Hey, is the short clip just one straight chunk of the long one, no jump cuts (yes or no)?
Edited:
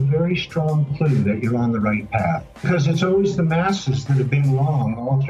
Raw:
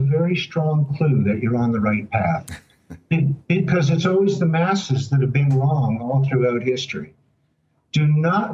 no